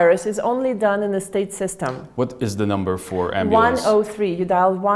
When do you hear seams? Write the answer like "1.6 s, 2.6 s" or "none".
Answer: none